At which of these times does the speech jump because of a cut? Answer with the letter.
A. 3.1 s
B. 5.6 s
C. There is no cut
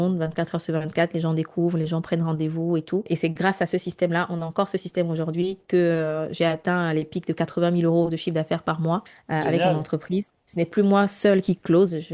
A